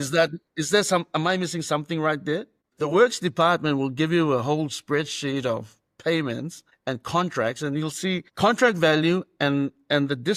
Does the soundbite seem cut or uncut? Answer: uncut